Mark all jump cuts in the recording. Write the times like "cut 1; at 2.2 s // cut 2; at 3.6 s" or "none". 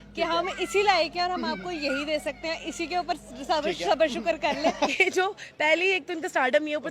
cut 1; at 4.9 s